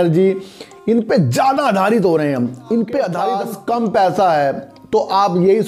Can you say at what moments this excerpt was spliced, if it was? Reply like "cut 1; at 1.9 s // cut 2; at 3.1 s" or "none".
cut 1; at 3.5 s